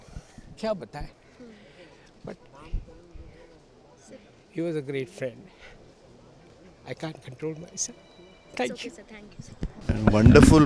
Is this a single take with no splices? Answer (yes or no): no